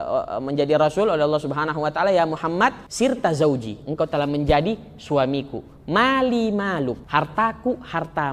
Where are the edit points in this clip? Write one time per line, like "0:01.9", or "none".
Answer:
0:02.8
0:07.0